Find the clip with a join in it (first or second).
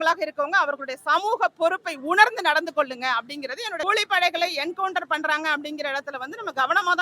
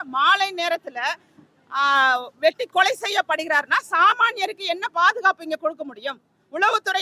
first